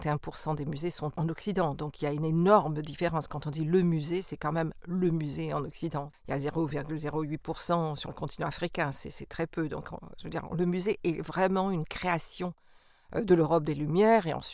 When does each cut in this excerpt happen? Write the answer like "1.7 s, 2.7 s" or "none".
1.1 s, 6.2 s